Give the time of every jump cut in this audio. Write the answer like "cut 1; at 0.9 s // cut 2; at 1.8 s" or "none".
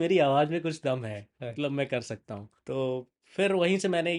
none